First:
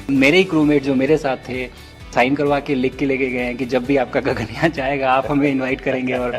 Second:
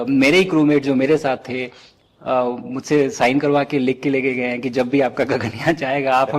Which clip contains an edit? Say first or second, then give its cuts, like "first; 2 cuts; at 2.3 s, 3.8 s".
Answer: first; 1 cut; at 2.1 s